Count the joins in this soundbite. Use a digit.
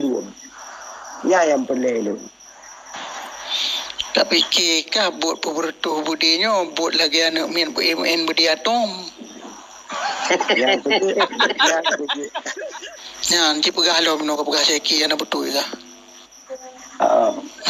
1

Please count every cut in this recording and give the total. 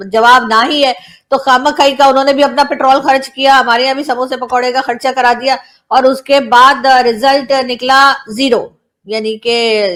0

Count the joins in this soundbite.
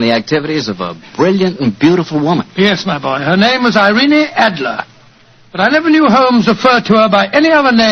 0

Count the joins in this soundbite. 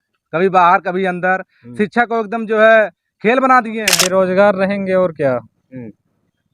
1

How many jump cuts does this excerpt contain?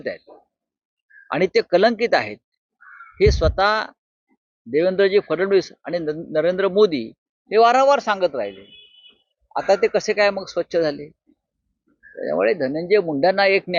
0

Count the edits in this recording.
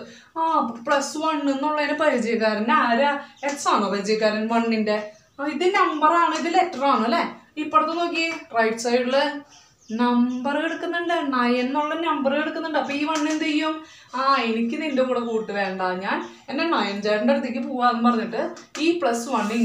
0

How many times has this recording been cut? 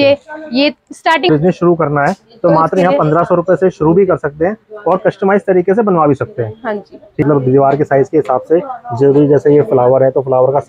2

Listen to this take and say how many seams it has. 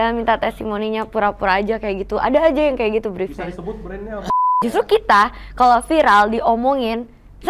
1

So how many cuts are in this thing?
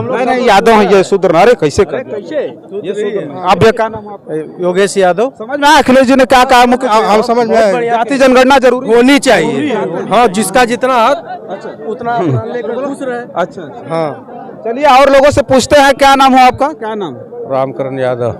0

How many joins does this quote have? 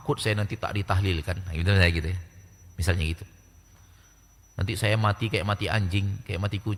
0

